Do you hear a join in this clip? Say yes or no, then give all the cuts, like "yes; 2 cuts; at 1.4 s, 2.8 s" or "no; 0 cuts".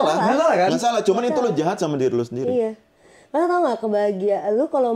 no; 0 cuts